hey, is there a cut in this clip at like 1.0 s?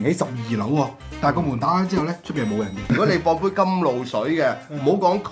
no; 1 cut; at 2.8 s

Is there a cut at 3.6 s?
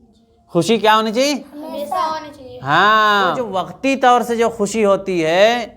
yes; 1 cut; at 3.6 s

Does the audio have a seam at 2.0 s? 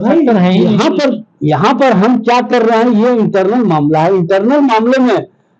no; 0 cuts

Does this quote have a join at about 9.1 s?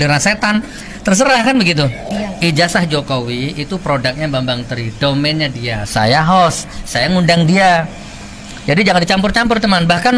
no; 1 cut; at 2.1 s

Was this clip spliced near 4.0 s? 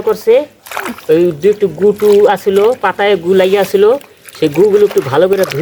no; 0 cuts

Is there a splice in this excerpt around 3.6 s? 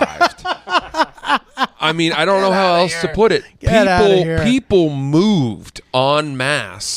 no; 0 cuts

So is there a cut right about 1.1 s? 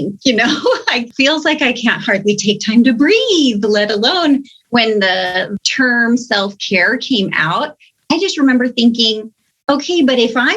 yes; 2 cuts; at 1.1 s, 5.5 s

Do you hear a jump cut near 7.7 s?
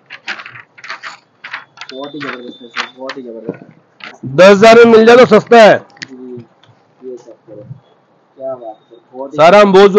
no; 1 cut; at 4.0 s

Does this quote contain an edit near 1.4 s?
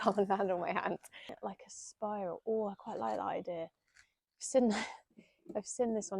yes; 1 cut; at 1.4 s

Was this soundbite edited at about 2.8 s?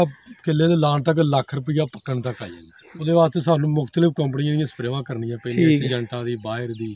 yes; 1 cut; at 2.8 s

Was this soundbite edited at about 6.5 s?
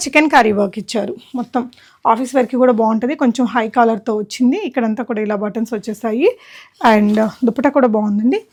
no; 0 cuts

